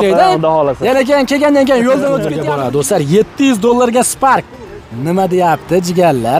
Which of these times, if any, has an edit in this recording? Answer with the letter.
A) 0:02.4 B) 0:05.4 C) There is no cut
A